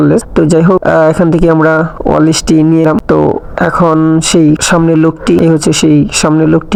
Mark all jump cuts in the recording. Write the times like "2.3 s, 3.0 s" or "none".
none